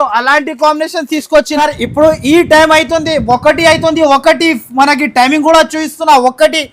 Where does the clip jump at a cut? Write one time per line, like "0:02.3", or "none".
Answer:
0:01.6

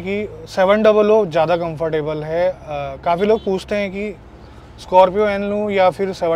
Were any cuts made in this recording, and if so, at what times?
none

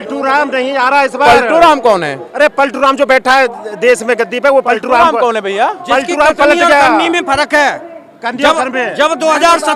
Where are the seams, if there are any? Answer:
none

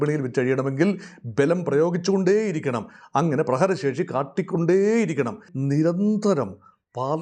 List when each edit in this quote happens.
0:05.5

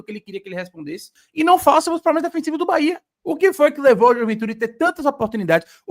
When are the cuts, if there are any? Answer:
0:01.2
0:03.1

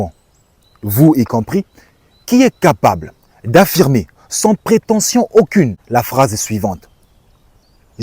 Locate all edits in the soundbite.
0:05.8

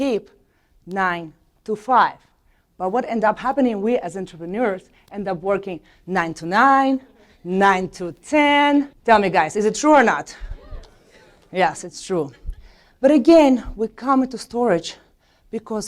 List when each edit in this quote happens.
0:08.9

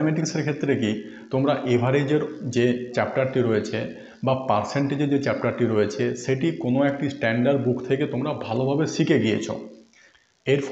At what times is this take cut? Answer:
none

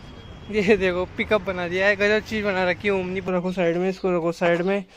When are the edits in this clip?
0:03.2

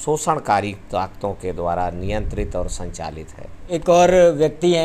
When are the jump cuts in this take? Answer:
0:03.6

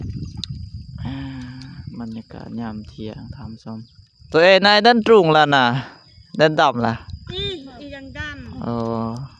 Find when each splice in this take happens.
0:04.3

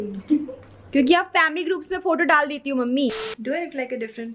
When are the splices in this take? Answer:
0:03.1

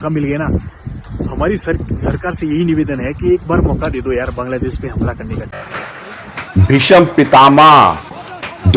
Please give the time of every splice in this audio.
0:05.5

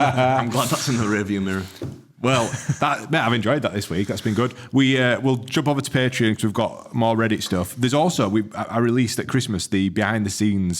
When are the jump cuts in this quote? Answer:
none

